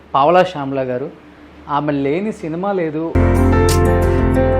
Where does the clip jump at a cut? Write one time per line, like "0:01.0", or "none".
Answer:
0:03.1